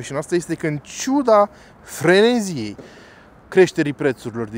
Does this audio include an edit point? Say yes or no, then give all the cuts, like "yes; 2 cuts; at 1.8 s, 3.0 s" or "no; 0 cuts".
no; 0 cuts